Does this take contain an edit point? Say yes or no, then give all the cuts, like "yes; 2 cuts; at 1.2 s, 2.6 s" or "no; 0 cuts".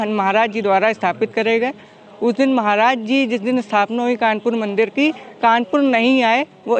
no; 0 cuts